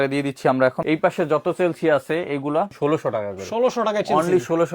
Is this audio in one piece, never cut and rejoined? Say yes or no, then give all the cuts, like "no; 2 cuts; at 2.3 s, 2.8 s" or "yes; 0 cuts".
no; 2 cuts; at 0.8 s, 2.7 s